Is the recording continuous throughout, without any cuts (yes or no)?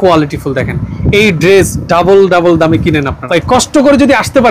no